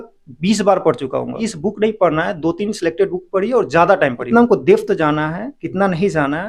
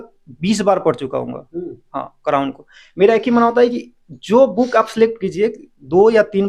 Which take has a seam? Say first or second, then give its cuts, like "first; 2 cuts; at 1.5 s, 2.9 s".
first; 2 cuts; at 1.4 s, 4.2 s